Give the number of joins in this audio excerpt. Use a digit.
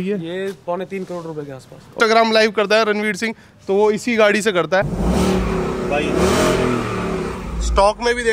2